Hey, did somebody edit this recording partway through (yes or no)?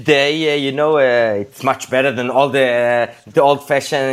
no